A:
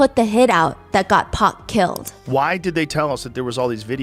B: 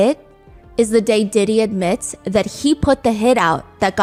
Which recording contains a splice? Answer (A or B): A